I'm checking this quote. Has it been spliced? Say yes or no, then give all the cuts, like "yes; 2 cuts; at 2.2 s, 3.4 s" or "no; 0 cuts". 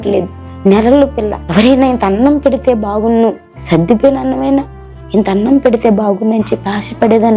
yes; 2 cuts; at 1.4 s, 3.5 s